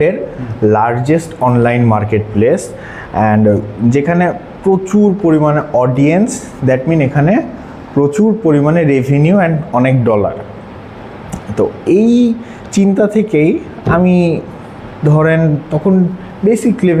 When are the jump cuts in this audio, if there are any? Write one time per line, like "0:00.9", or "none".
none